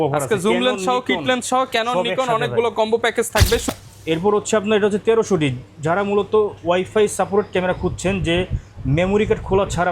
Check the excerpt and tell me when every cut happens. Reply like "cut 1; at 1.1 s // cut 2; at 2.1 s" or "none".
cut 1; at 3.7 s